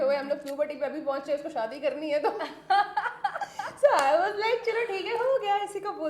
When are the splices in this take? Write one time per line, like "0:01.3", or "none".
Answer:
none

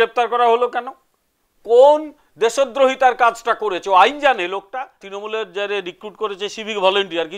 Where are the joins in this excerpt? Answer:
0:05.0

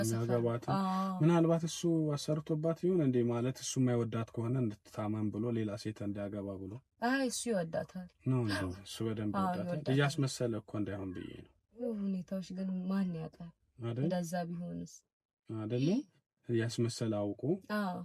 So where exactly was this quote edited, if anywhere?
none

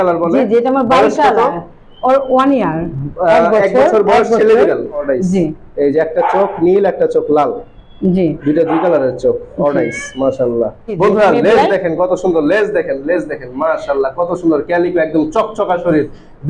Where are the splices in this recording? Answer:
0:05.0
0:10.9

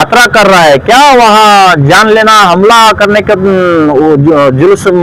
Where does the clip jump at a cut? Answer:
none

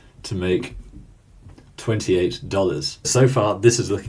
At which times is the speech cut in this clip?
0:03.1

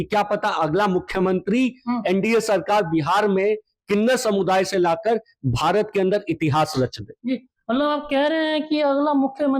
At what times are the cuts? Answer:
none

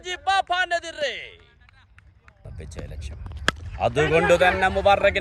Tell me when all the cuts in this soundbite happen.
0:02.6

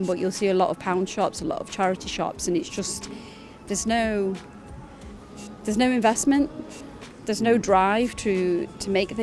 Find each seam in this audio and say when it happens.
none

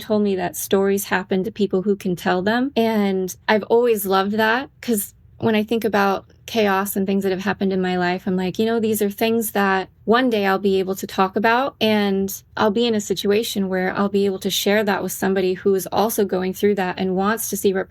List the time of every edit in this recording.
0:02.7
0:09.9
0:11.7
0:12.4

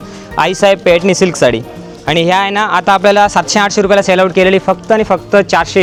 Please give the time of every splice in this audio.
none

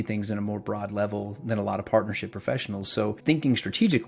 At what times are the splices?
0:03.2

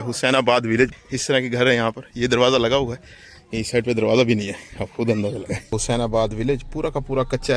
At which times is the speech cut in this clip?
0:01.0
0:05.4

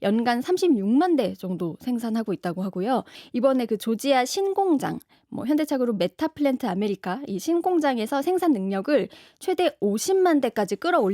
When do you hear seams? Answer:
0:03.2

